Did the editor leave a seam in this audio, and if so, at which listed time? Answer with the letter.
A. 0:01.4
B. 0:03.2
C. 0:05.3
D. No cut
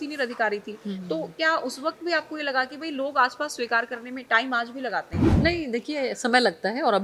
C